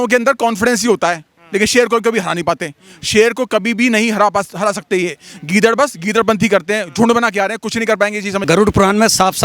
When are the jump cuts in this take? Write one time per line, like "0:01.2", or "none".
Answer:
0:08.4